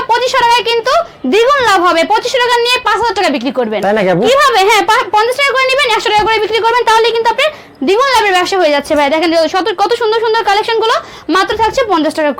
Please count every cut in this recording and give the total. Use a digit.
0